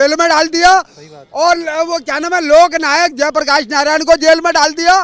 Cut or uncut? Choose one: uncut